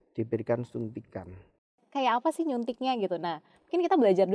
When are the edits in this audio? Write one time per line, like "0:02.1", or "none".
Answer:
0:01.8